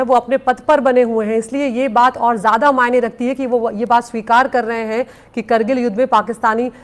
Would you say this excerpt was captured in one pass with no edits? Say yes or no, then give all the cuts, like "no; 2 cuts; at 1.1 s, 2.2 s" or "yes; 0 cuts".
yes; 0 cuts